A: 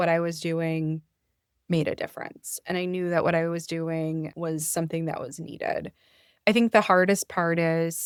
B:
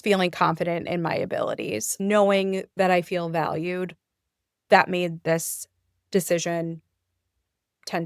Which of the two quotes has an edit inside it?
B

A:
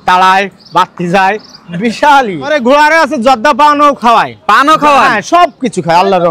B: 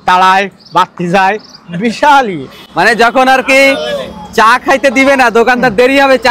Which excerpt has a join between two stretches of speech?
A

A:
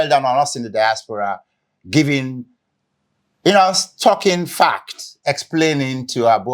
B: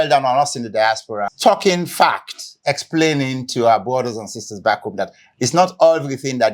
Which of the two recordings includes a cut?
B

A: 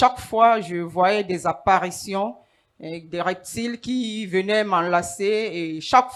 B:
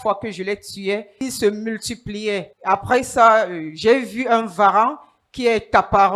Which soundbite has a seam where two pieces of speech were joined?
B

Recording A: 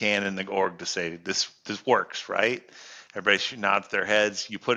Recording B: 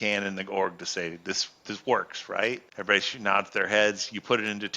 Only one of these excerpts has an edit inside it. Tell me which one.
B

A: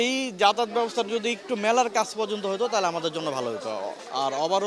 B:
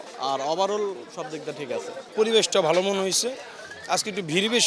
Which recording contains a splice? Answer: B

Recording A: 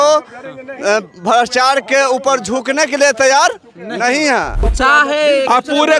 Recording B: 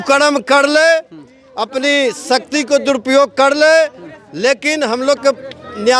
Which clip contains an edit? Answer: A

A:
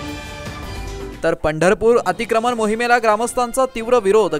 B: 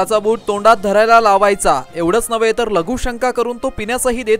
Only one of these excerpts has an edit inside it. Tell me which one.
A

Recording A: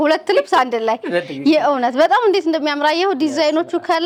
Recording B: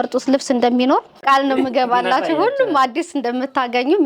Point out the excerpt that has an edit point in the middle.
B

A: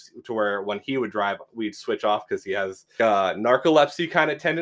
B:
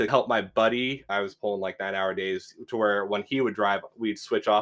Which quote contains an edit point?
B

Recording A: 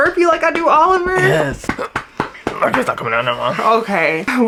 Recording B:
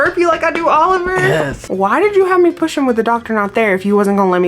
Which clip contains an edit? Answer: B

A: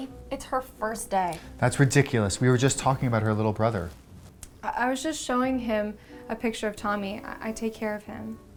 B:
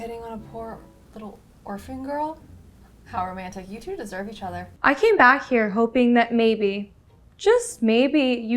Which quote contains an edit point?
B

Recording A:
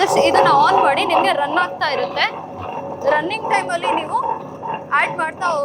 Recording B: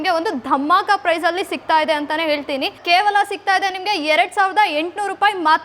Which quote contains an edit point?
B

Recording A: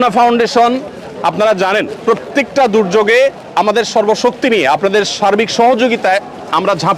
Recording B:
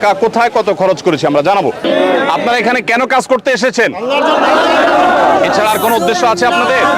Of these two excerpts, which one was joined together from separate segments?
B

